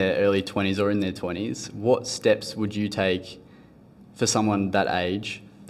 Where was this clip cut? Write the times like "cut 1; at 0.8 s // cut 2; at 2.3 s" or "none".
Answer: none